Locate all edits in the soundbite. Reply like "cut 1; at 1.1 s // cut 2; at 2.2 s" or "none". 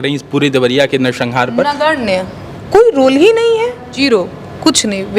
cut 1; at 2.5 s // cut 2; at 4.0 s